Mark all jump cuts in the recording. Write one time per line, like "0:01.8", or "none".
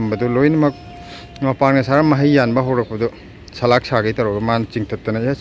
none